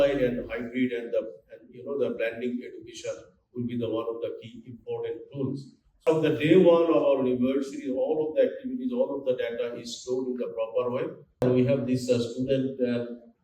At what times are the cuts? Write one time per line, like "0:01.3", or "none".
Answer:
0:06.0
0:11.4